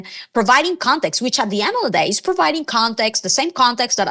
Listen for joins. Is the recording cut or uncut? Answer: uncut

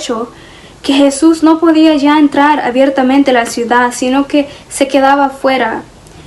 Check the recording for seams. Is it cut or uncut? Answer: uncut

